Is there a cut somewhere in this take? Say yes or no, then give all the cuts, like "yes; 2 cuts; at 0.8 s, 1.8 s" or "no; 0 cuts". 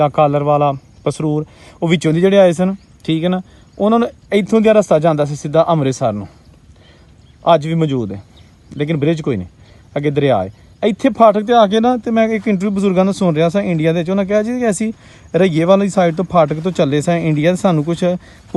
no; 0 cuts